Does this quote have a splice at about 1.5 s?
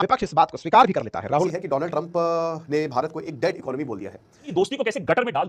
yes; 2 cuts; at 1.5 s, 4.5 s

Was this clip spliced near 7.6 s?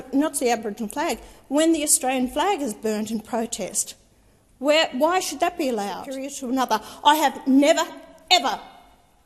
no; 1 cut; at 6.3 s

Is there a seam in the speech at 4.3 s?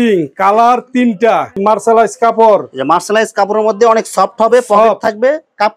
no; 1 cut; at 1.6 s

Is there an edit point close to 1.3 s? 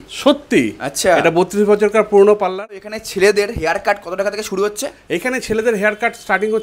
no; 1 cut; at 3.0 s

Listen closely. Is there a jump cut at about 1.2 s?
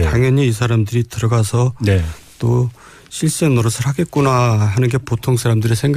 no; 0 cuts

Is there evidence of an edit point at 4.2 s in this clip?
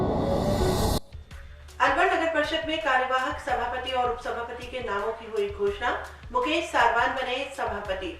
no; 1 cut; at 1.1 s

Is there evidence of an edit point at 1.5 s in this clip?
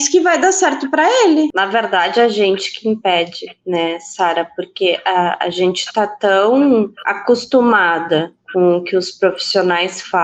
yes; 1 cut; at 1.5 s

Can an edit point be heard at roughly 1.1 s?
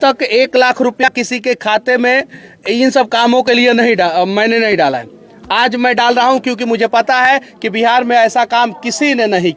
yes; 1 cut; at 1.1 s

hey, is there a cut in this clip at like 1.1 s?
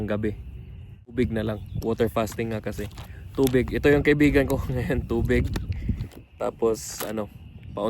yes; 1 cut; at 1.1 s

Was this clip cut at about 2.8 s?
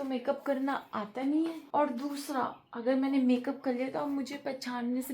no; 1 cut; at 1.6 s

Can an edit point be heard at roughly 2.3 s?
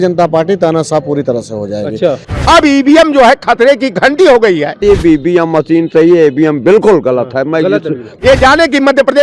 yes; 3 cuts; at 2.3 s, 4.8 s, 8.0 s

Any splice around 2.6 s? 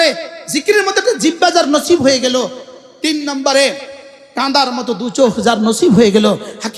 no; 0 cuts

